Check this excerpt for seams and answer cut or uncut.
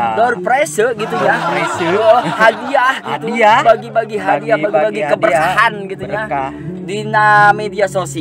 uncut